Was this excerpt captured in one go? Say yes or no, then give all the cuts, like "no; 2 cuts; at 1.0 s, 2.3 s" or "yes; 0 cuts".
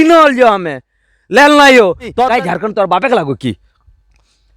no; 1 cut; at 2.1 s